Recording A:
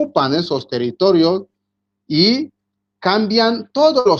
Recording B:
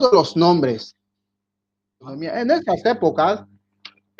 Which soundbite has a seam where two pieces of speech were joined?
B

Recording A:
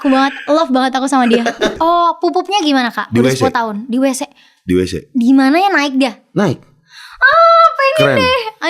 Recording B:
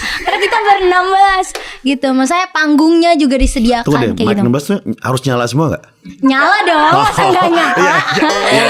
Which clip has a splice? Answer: A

